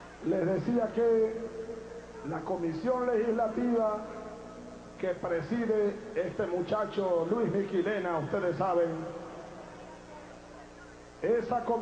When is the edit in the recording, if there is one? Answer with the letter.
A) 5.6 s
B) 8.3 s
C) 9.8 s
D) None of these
A